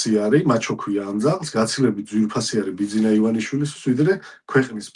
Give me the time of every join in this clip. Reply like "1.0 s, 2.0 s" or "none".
none